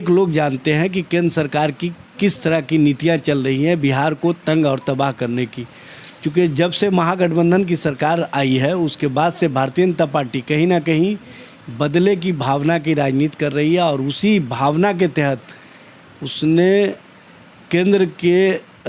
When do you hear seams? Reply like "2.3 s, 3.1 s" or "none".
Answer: none